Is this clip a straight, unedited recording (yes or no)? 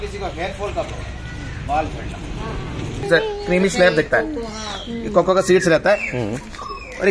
no